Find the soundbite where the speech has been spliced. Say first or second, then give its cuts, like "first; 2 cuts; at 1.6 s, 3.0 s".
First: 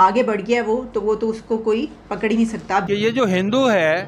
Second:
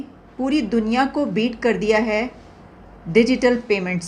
first; 1 cut; at 2.9 s